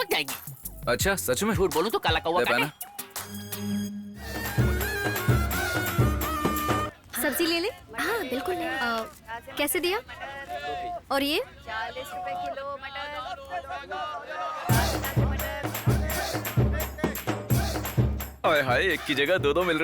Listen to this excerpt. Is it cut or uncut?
cut